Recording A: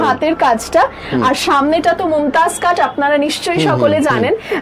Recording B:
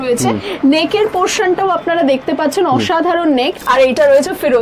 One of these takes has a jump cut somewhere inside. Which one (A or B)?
B